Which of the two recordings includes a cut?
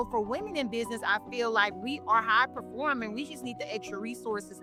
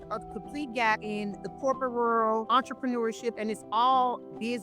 second; 2 cuts; at 1.1 s, 2.5 s

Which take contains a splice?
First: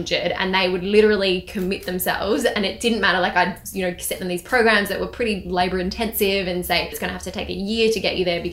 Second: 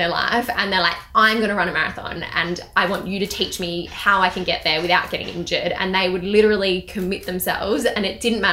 first; 1 cut; at 7.0 s

